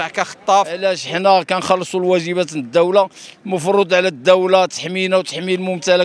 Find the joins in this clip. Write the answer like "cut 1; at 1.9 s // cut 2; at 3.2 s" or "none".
cut 1; at 0.9 s